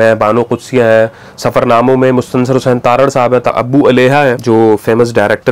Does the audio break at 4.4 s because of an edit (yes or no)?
yes